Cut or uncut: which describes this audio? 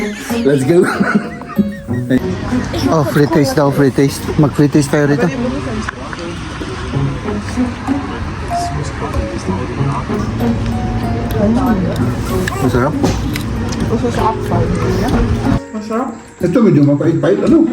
cut